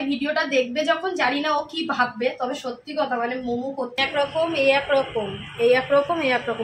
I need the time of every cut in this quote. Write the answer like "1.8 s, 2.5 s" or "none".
4.0 s